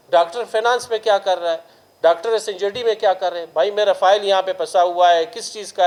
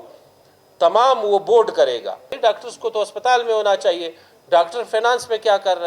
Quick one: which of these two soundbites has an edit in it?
second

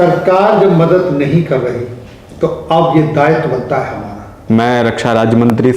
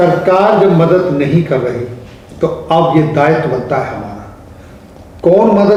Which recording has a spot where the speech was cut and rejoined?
first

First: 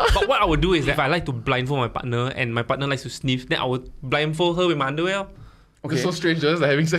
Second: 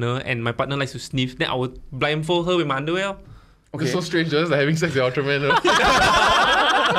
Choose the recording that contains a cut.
first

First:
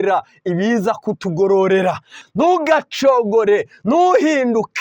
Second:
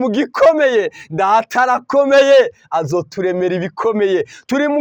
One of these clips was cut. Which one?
first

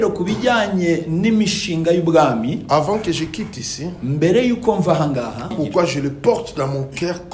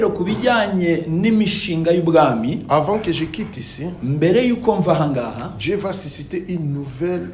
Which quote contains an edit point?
first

